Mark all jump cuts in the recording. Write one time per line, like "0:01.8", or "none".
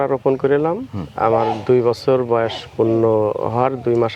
none

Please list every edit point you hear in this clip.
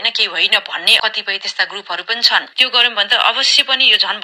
none

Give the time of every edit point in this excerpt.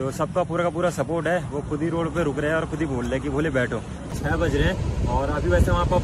0:04.1

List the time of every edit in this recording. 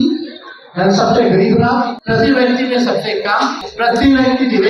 0:02.0
0:03.6

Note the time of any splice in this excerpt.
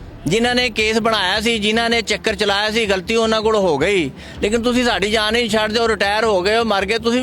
none

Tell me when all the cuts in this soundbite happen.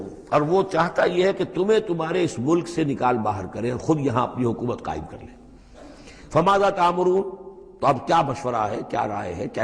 none

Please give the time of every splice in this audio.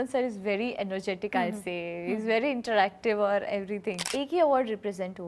0:04.0

